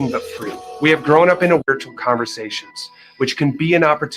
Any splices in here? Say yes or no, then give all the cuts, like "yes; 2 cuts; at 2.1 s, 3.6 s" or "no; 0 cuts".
yes; 1 cut; at 1.6 s